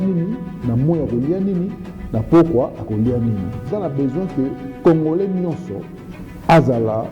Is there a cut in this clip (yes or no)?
yes